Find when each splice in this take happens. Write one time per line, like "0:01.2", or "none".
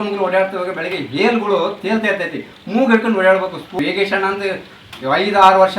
0:03.8